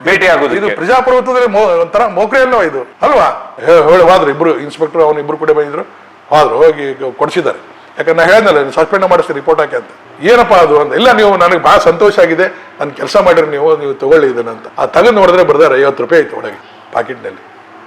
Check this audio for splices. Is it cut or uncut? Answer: cut